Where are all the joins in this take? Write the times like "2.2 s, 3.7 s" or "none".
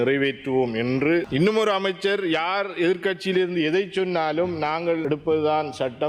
1.3 s, 5.0 s